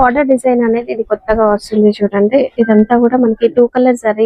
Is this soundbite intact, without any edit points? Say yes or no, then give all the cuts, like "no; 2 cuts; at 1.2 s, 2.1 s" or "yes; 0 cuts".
yes; 0 cuts